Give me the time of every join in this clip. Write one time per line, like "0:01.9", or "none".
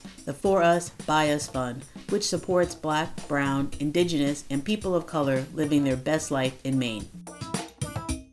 0:07.2

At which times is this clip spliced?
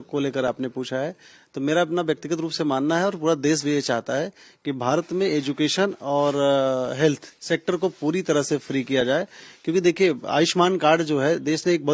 none

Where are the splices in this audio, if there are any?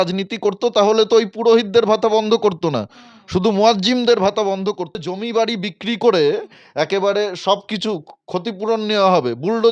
0:05.0

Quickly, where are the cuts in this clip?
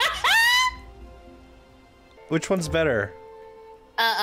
0:02.1

